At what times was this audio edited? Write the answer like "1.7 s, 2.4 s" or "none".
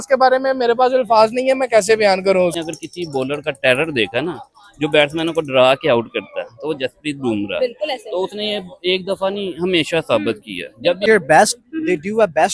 2.6 s, 11.1 s